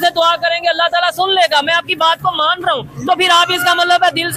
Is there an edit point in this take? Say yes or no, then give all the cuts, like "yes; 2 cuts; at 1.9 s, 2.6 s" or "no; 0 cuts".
no; 0 cuts